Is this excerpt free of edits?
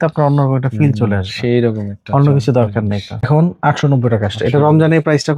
no; 1 cut; at 3.3 s

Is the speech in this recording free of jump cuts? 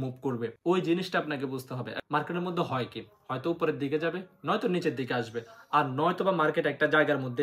no; 1 cut; at 1.9 s

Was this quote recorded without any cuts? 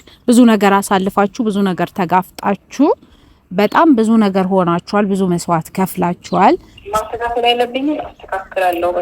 no; 1 cut; at 6.8 s

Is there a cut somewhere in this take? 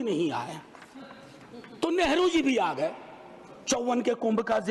no; 0 cuts

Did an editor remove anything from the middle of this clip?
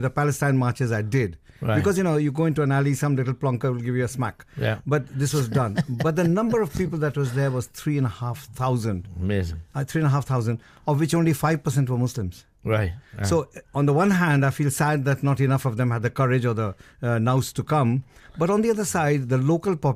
no; 0 cuts

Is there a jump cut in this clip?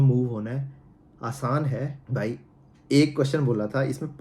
yes; 1 cut; at 2.0 s

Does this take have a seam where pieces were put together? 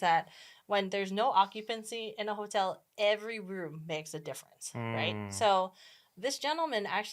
no; 0 cuts

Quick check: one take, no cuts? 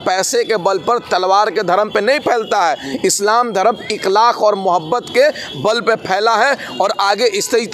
yes; 0 cuts

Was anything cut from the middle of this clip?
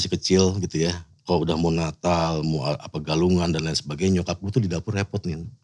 yes; 1 cut; at 1.1 s

